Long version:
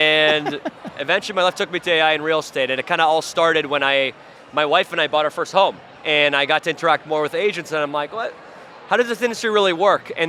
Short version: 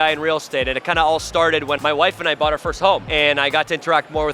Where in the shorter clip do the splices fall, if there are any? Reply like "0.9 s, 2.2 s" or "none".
1.8 s, 3.1 s